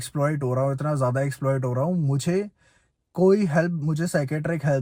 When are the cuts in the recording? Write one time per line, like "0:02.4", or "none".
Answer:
none